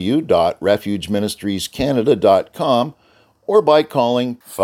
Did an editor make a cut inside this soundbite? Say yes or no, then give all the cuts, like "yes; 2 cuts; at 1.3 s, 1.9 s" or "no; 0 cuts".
no; 0 cuts